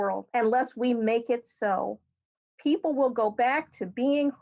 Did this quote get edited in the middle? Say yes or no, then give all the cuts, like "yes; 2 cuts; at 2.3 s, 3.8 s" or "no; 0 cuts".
no; 0 cuts